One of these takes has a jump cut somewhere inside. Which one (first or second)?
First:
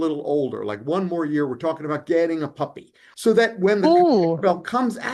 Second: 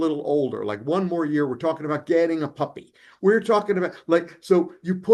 first